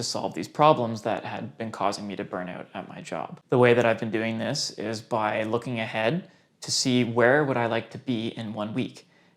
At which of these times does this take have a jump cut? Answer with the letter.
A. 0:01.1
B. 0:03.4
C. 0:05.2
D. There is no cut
B